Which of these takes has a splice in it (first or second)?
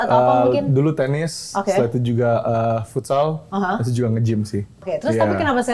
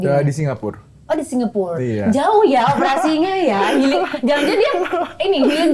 first